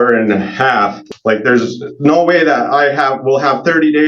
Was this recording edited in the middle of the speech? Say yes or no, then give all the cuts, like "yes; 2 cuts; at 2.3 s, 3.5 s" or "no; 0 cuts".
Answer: yes; 1 cut; at 1.0 s